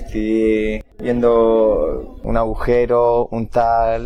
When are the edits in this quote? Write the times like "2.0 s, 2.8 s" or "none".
0.9 s, 2.1 s